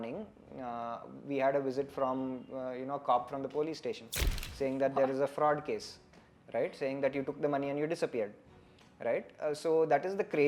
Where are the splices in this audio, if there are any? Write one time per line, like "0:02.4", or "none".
none